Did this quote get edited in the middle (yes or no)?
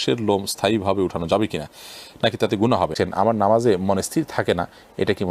yes